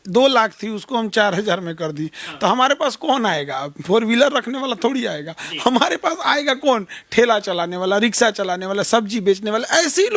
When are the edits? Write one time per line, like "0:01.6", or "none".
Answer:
none

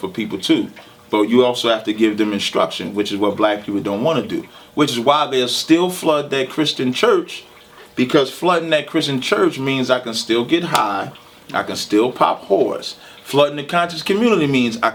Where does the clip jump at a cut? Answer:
none

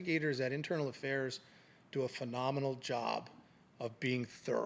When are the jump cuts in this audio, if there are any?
none

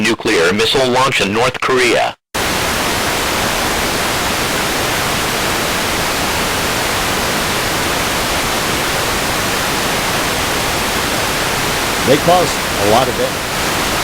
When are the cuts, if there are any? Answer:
none

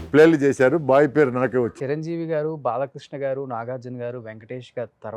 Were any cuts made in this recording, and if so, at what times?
0:01.7

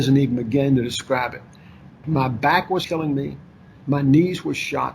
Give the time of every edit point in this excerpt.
0:01.9

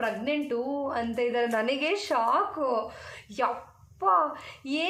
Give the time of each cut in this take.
none

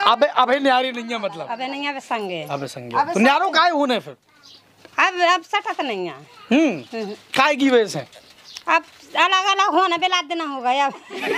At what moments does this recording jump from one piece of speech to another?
none

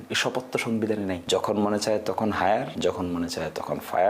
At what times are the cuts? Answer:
0:01.2
0:02.7

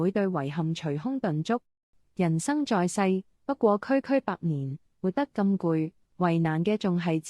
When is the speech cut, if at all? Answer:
0:02.0

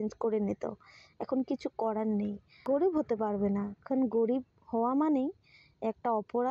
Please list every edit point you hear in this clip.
0:02.6

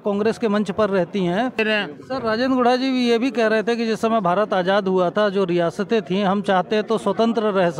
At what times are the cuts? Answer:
0:01.6

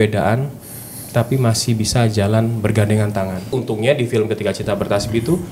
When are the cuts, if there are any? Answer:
0:03.5

